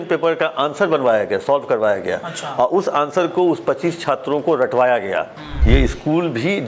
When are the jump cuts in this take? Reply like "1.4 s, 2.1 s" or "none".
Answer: 5.5 s